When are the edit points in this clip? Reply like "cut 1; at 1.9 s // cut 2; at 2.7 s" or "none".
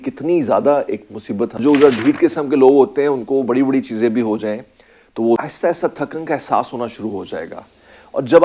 cut 1; at 1.6 s // cut 2; at 5.4 s